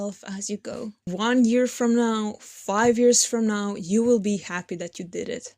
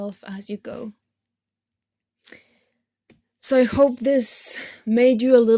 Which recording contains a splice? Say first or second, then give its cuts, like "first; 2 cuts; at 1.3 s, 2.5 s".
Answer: first; 1 cut; at 1.0 s